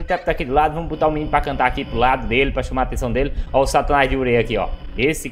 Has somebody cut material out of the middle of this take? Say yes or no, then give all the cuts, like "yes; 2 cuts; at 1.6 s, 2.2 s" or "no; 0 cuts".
no; 0 cuts